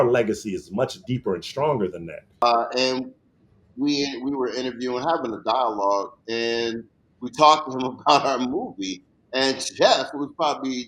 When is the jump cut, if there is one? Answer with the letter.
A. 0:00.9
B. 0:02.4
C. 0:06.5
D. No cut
B